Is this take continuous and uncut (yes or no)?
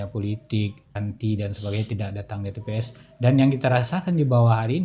no